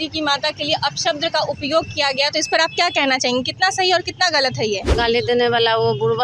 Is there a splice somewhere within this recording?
yes; 1 cut; at 4.9 s

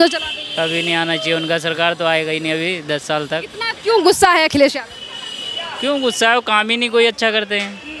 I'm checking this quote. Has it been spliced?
no; 0 cuts

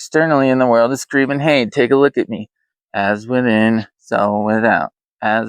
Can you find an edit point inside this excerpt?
no; 0 cuts

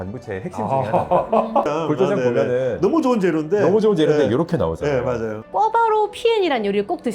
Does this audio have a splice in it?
yes; 2 cuts; at 1.7 s, 5.4 s

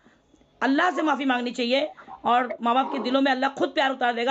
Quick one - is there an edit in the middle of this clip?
yes; 1 cut; at 2.0 s

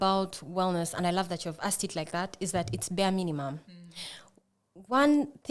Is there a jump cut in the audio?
no; 0 cuts

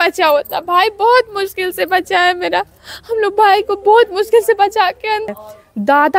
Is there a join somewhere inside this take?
yes; 1 cut; at 5.2 s

